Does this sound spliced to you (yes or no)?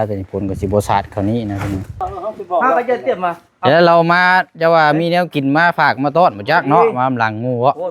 yes